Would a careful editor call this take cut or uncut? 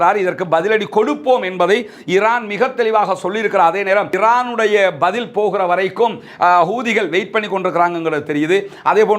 cut